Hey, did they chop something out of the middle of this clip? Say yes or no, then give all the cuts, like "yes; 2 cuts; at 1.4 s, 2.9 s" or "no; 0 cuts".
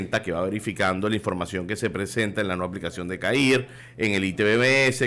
yes; 1 cut; at 3.8 s